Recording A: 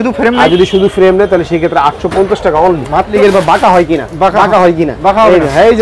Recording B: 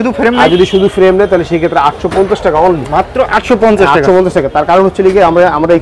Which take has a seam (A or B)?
A